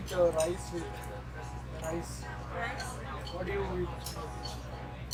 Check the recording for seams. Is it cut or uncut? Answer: uncut